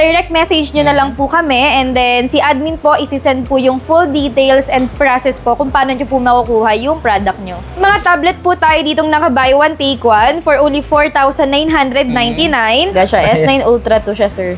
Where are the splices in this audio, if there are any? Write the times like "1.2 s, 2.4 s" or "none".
7.7 s, 12.9 s